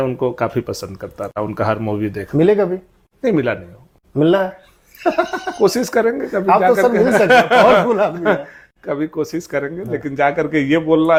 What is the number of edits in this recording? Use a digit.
0